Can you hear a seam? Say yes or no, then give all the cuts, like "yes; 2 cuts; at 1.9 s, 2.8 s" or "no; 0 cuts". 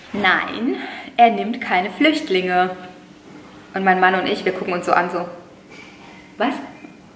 no; 0 cuts